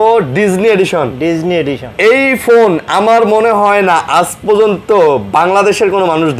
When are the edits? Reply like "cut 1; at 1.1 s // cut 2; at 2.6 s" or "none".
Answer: none